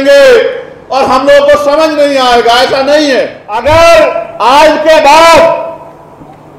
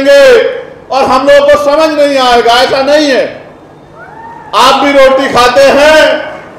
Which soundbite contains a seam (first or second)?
first